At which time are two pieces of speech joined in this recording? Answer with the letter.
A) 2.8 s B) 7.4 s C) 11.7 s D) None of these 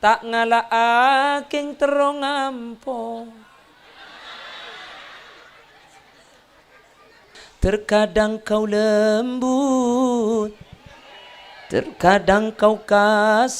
B